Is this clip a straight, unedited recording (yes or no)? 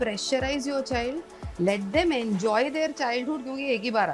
yes